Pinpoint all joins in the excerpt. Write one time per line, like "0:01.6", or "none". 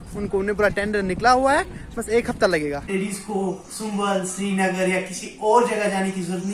0:02.9